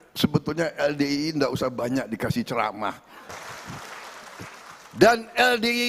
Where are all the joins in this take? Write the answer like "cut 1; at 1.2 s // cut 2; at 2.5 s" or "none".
cut 1; at 3.2 s